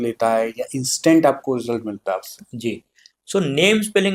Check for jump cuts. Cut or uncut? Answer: uncut